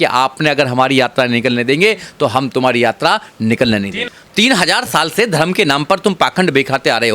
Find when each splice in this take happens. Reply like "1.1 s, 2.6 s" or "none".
4.0 s